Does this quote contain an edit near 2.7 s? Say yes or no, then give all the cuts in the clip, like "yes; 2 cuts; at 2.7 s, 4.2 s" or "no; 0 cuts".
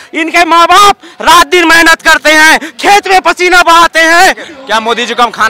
no; 1 cut; at 4.5 s